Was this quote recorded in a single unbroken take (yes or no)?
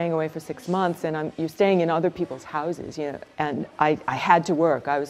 no